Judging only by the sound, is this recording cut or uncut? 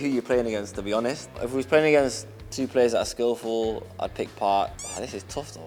uncut